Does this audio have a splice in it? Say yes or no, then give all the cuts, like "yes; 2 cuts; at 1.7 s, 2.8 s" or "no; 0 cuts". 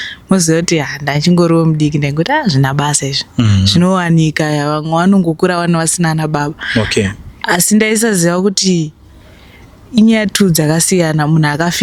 no; 0 cuts